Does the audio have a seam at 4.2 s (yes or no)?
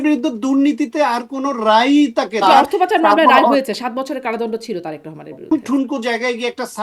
no